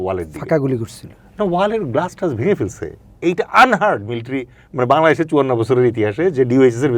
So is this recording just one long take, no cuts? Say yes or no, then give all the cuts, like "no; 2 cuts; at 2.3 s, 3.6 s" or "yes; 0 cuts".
yes; 0 cuts